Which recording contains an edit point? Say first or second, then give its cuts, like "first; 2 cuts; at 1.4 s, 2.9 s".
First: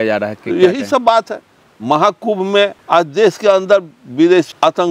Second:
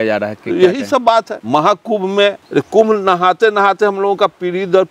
second; 2 cuts; at 1.4 s, 2.4 s